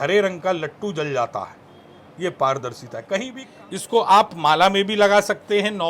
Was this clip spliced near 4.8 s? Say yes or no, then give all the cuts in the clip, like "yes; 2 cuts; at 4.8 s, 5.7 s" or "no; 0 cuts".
no; 1 cut; at 3.4 s